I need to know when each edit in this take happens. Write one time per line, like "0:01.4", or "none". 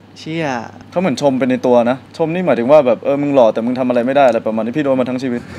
none